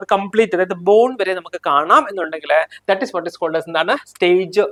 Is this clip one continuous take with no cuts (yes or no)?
yes